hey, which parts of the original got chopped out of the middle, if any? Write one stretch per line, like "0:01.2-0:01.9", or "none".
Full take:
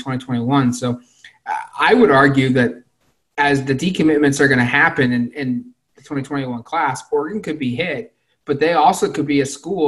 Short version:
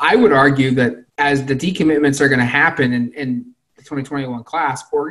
0:02.8-0:03.2